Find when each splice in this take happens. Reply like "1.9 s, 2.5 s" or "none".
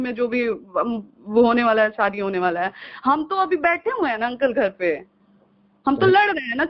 none